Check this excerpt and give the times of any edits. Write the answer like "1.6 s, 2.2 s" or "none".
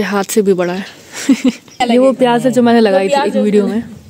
1.8 s

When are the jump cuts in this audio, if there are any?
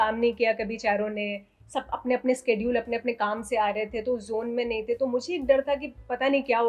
none

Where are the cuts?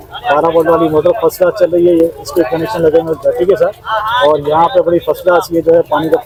none

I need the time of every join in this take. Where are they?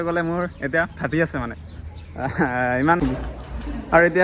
3.0 s

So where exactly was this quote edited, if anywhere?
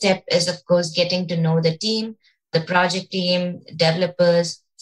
2.5 s

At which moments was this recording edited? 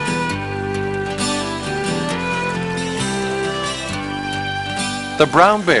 3.2 s

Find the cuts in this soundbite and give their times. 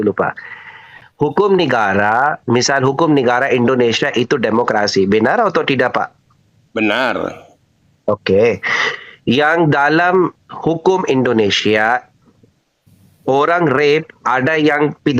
none

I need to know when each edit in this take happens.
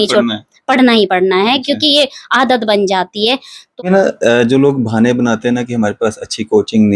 3.6 s

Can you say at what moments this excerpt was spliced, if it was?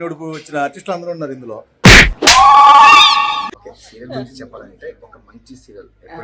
3.6 s

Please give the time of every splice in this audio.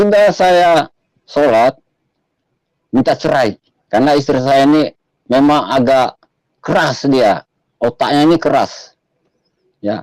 none

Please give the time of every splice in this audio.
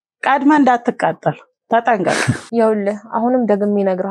2.4 s

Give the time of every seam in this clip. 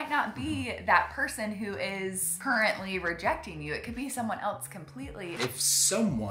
2.3 s, 5.4 s

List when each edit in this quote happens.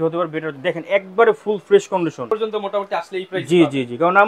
2.2 s

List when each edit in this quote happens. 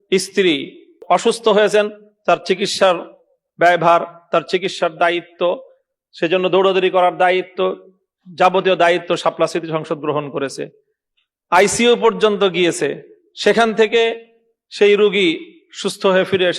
1.0 s

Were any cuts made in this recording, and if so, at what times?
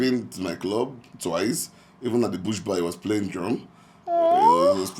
none

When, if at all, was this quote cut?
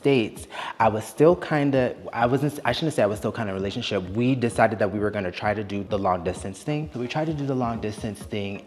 5.8 s, 6.9 s

